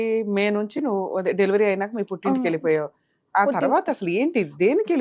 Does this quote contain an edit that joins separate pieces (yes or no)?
no